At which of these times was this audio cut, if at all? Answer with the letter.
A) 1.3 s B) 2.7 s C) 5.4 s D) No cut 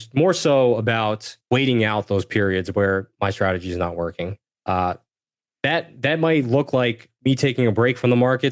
A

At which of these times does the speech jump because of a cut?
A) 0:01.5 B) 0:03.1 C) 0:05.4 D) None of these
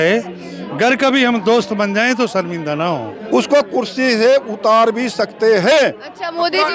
B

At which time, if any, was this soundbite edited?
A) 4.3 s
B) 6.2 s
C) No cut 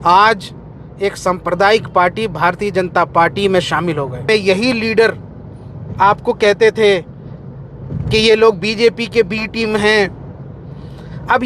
A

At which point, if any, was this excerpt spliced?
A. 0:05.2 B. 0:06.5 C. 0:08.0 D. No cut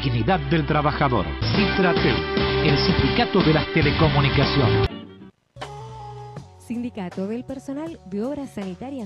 A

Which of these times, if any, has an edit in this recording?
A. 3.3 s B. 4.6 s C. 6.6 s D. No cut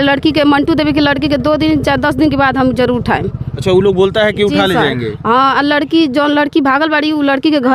D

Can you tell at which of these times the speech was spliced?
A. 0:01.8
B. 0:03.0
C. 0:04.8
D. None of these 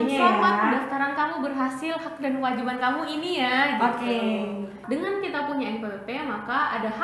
C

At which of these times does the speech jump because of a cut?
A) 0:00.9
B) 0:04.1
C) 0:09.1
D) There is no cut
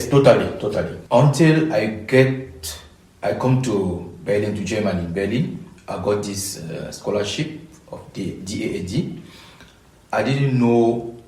A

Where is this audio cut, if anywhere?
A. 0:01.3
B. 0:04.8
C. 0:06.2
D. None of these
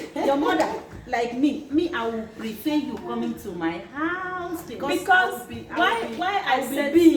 D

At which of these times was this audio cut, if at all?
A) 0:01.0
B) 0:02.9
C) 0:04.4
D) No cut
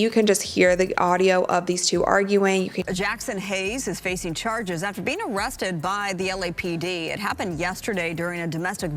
B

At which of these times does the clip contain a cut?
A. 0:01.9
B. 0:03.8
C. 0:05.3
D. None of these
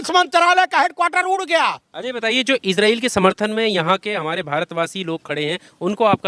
A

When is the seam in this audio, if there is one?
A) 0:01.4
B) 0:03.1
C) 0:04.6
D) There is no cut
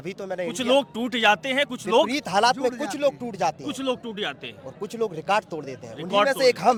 D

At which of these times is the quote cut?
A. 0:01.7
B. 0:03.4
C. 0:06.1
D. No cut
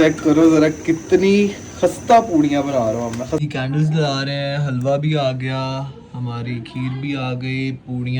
B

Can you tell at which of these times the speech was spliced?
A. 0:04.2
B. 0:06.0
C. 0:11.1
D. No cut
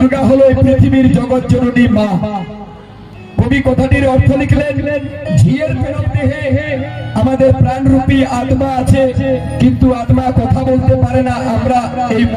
B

